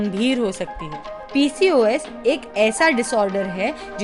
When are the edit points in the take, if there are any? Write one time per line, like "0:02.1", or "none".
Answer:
0:01.1